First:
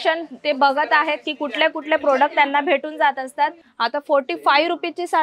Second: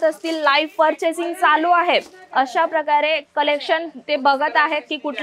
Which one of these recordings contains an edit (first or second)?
first